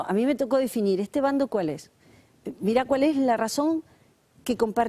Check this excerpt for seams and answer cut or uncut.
cut